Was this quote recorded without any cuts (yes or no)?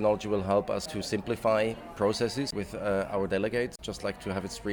no